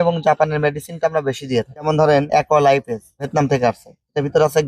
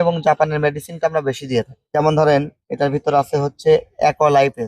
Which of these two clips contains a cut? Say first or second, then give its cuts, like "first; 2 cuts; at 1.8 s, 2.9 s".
first; 1 cut; at 2.1 s